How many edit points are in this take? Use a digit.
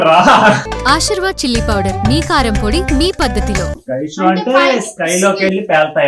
1